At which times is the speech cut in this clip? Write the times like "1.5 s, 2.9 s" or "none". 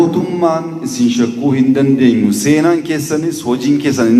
none